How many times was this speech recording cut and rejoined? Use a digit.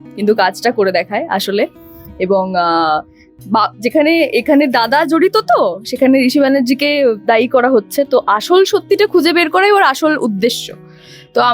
0